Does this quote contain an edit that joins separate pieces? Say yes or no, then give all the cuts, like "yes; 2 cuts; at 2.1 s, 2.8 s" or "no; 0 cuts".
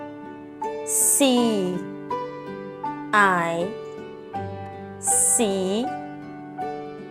yes; 2 cuts; at 4.2 s, 5.4 s